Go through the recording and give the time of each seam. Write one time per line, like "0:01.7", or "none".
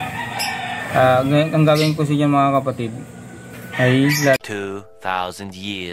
0:04.4

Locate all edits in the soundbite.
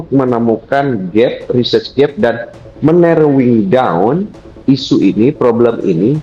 none

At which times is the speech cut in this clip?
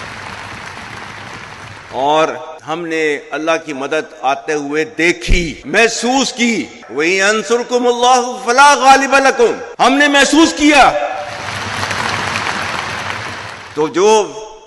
none

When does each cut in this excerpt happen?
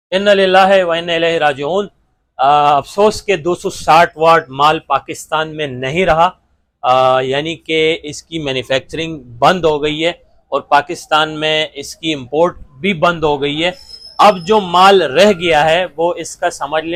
none

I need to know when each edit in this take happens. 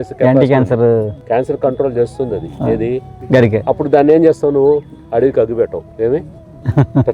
0:01.2
0:03.1
0:05.0

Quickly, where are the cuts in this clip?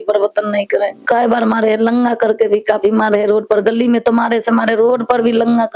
0:01.0

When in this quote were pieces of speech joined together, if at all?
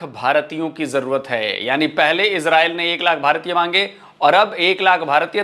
none

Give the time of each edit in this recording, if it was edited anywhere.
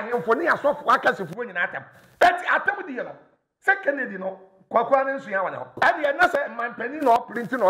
0:05.8

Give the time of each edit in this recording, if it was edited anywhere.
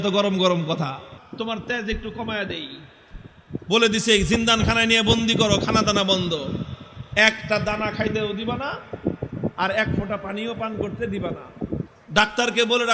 0:01.1

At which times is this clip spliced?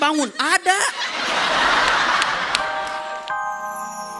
0:03.0

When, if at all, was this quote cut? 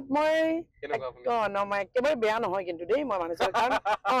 none

